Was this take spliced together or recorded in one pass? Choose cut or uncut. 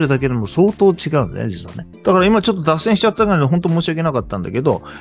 uncut